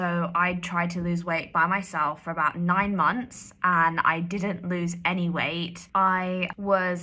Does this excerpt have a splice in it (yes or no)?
yes